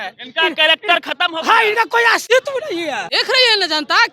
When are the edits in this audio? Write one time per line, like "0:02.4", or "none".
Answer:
0:02.2
0:03.1